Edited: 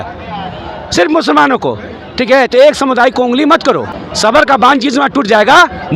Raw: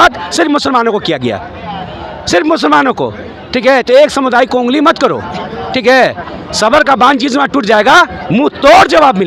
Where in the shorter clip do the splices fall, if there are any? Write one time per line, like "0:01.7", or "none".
0:04.1